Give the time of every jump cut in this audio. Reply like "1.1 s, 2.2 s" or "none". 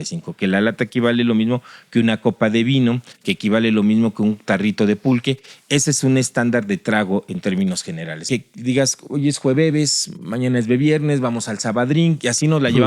8.2 s